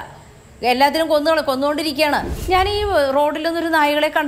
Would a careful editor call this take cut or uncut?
cut